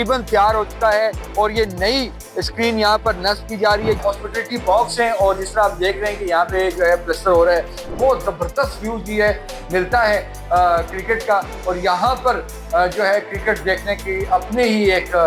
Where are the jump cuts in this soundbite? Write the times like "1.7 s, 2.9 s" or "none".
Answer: 4.0 s, 7.9 s